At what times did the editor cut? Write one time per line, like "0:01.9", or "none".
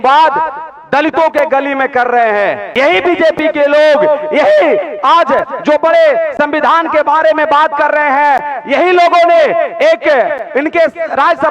0:02.7